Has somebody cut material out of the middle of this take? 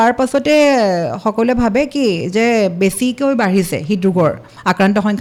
no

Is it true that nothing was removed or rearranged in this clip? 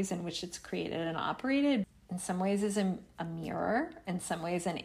no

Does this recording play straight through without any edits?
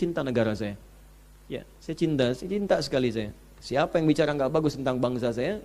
yes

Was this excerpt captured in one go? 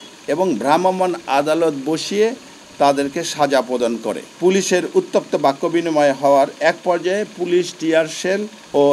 no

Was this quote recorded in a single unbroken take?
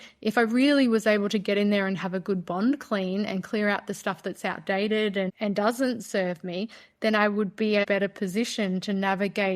no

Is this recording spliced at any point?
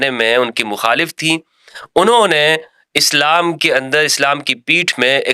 no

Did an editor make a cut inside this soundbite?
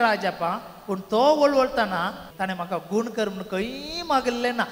yes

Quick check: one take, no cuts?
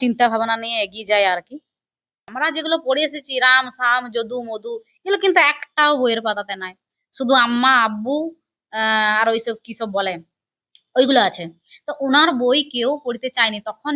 no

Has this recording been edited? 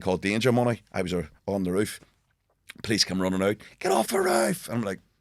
no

